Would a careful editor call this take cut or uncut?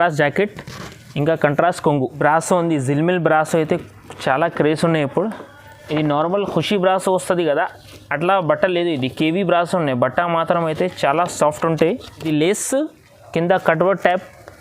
cut